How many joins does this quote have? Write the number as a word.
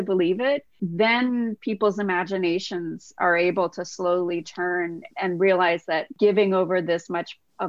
three